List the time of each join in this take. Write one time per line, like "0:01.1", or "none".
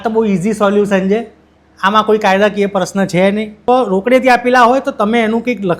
0:03.5